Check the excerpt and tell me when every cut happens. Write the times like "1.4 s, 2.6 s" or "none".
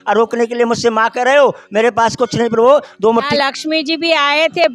3.2 s